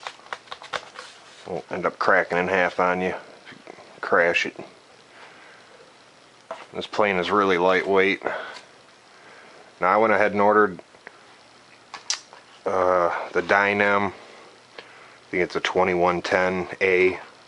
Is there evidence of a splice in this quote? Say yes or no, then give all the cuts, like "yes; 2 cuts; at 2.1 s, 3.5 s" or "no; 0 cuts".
yes; 1 cut; at 3.3 s